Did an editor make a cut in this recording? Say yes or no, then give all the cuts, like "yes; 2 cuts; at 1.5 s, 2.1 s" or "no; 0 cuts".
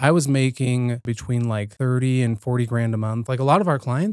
yes; 2 cuts; at 1.3 s, 3.2 s